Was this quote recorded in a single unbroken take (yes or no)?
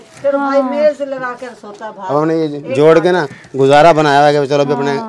yes